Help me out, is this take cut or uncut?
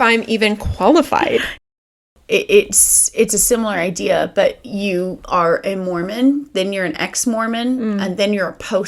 cut